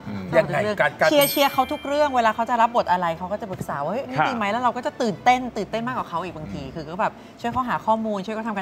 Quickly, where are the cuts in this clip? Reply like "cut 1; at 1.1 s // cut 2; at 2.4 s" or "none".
none